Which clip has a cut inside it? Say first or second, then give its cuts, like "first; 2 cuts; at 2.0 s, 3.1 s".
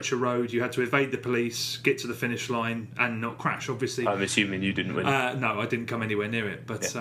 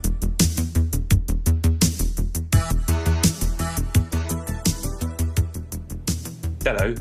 first; 1 cut; at 2.0 s